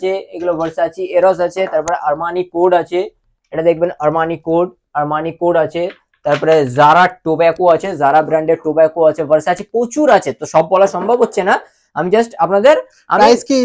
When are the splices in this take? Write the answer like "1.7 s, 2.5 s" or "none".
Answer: none

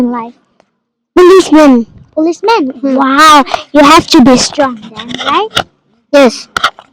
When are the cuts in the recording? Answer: none

